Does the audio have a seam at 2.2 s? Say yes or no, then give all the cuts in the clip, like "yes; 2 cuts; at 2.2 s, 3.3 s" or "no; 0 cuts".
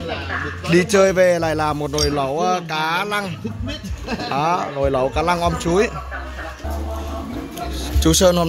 no; 1 cut; at 6.6 s